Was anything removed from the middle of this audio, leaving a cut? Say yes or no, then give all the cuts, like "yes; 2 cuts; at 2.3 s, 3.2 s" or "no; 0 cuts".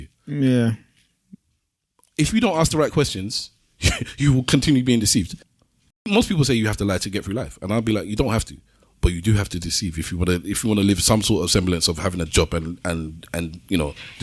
yes; 1 cut; at 5.4 s